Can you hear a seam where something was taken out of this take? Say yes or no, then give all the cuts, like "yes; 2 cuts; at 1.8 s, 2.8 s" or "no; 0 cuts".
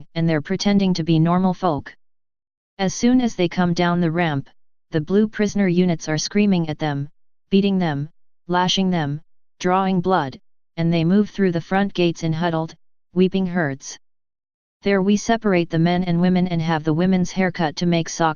no; 0 cuts